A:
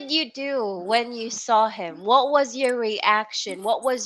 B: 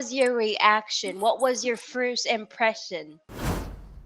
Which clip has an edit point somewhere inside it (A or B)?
B